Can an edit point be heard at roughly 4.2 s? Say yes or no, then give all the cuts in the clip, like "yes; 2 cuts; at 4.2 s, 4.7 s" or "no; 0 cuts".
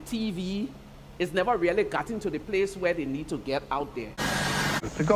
yes; 1 cut; at 4.2 s